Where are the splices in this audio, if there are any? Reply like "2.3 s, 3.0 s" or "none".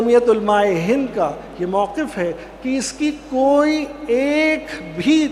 none